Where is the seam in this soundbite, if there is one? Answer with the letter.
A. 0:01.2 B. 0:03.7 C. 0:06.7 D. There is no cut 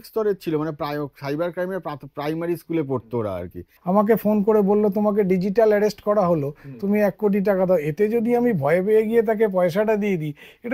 B